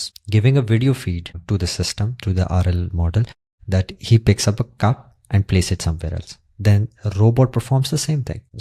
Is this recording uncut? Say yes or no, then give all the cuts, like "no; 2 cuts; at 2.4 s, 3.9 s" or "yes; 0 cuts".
yes; 0 cuts